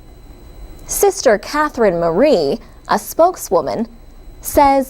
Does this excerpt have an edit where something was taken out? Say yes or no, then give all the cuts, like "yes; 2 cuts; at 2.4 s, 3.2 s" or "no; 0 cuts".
yes; 1 cut; at 1.2 s